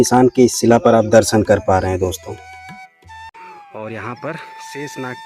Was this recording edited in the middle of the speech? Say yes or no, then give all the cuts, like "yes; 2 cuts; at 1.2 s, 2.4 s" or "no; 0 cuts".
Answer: yes; 1 cut; at 3.3 s